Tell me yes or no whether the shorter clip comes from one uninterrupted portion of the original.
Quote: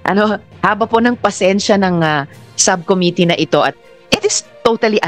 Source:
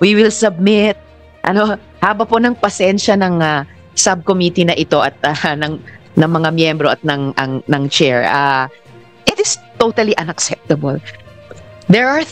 no